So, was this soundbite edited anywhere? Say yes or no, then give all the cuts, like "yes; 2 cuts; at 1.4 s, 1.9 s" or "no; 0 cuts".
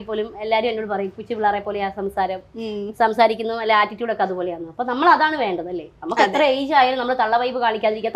no; 0 cuts